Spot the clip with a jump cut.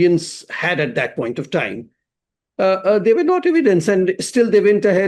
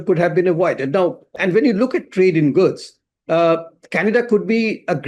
second; 1 cut; at 1.2 s

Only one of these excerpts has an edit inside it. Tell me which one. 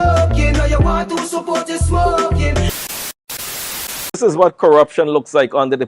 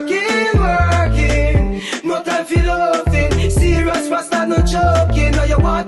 first; 1 cut; at 2.7 s

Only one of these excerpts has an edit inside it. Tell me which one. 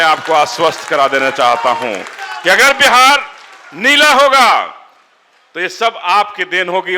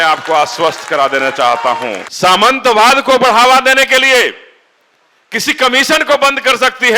second; 1 cut; at 2.1 s

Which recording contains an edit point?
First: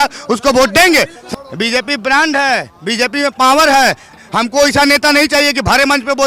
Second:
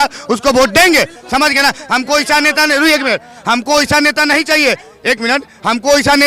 first; 2 cuts; at 1.2 s, 4.2 s

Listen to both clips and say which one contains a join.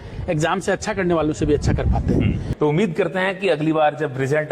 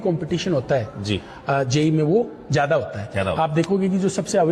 first; 1 cut; at 2.4 s

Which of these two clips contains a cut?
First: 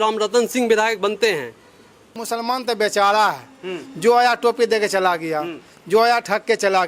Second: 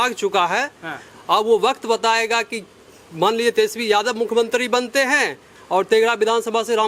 first; 1 cut; at 2.1 s

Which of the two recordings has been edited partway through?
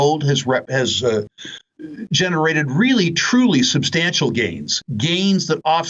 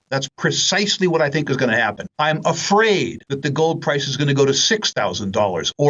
second; 2 cuts; at 2.0 s, 3.2 s

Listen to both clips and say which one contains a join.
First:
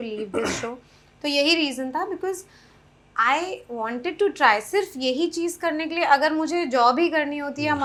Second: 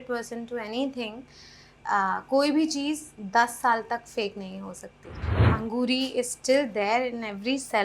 second; 1 cut; at 5.4 s

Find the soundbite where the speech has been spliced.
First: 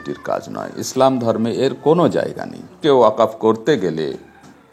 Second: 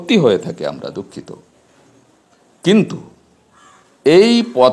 first; 1 cut; at 2.8 s

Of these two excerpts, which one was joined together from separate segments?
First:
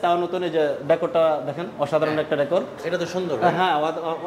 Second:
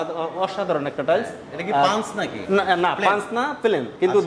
first; 1 cut; at 2.8 s

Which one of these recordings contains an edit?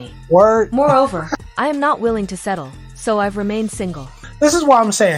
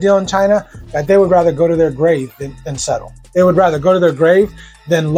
first; 1 cut; at 4.2 s

